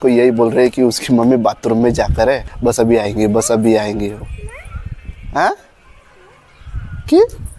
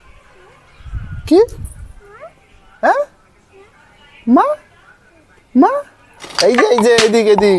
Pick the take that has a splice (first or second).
first